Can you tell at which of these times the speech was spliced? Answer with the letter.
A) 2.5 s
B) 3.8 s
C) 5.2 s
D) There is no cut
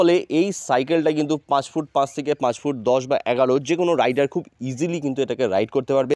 D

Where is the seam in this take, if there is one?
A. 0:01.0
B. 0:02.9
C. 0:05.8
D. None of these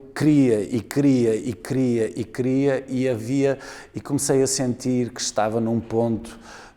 D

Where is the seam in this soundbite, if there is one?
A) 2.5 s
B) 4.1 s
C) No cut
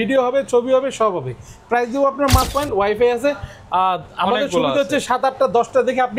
A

